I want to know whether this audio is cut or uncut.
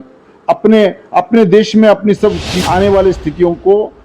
cut